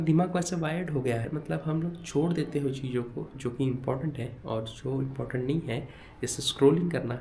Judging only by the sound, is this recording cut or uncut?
cut